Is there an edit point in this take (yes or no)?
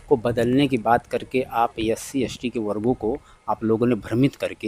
no